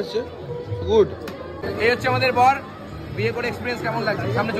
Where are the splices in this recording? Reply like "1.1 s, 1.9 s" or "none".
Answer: 1.5 s